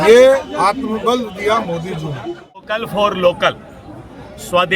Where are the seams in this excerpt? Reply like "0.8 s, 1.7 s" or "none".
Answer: 2.7 s